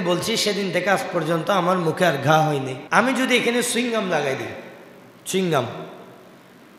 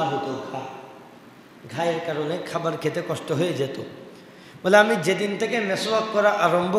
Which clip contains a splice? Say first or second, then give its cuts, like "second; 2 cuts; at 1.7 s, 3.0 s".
first; 1 cut; at 2.8 s